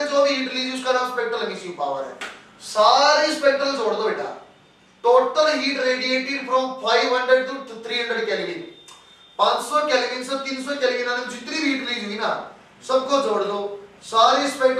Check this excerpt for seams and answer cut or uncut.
uncut